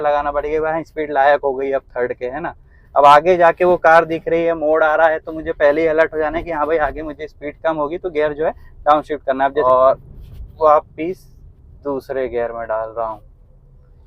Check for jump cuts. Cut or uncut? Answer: cut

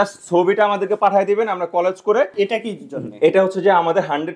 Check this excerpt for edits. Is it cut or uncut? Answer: cut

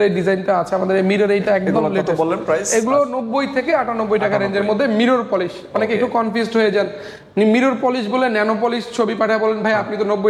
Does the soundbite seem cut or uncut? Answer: uncut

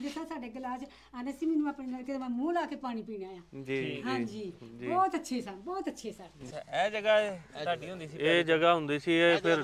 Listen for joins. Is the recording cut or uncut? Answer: cut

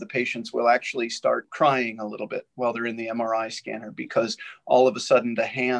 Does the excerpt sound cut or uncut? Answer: cut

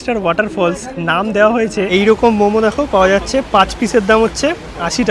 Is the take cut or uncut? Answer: cut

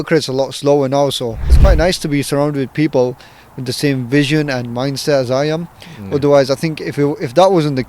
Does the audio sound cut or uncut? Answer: cut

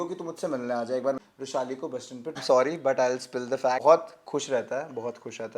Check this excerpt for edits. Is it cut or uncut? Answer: cut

